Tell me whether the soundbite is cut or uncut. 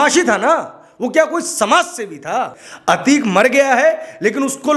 cut